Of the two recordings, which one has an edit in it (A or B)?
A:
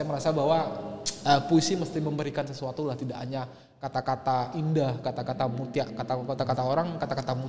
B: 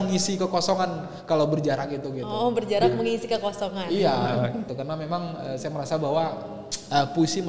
B